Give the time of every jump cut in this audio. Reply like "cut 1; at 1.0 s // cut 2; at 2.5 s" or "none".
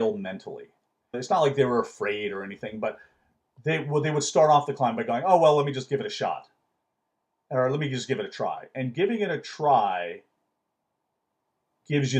cut 1; at 1.2 s